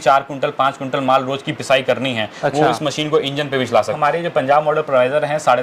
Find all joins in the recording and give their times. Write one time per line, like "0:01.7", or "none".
0:04.0